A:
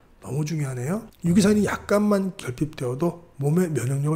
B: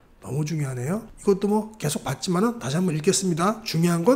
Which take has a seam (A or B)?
A